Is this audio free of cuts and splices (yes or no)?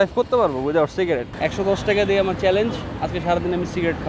no